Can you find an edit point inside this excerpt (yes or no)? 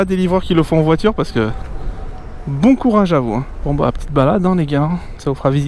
yes